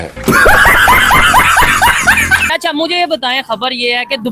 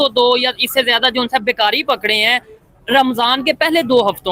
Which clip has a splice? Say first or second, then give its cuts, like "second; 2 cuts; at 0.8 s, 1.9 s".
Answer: first; 1 cut; at 2.4 s